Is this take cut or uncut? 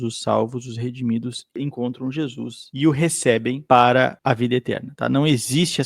cut